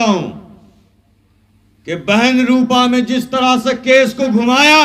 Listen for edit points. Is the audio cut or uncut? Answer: uncut